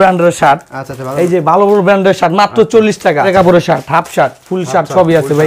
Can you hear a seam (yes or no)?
yes